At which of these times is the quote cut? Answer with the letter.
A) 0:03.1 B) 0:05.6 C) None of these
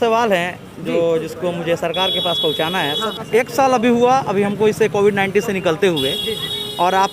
A